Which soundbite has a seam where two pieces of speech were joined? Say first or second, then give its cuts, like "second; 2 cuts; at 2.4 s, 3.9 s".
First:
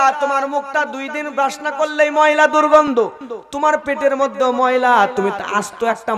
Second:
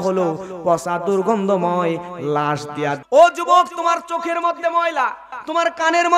second; 1 cut; at 3.0 s